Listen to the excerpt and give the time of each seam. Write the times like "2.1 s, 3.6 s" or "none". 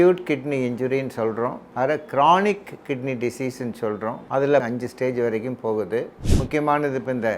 1.6 s, 4.5 s, 6.2 s